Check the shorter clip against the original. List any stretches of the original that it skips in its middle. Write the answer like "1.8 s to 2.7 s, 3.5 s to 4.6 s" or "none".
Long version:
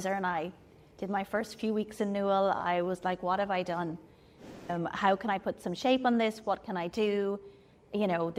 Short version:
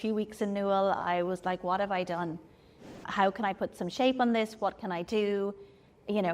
4.6 s to 4.9 s